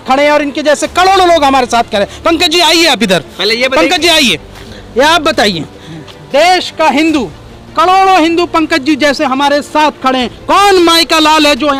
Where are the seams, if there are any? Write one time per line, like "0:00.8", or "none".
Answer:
none